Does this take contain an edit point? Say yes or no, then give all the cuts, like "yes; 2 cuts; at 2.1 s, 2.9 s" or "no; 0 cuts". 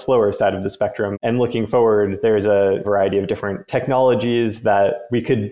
yes; 2 cuts; at 1.1 s, 2.8 s